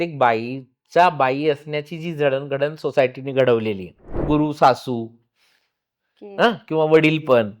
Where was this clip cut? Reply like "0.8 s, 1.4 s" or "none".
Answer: 4.2 s